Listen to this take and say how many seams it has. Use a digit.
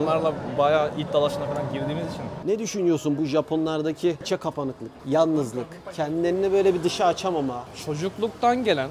2